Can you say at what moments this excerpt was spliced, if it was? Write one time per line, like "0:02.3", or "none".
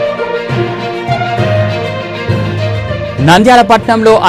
0:03.1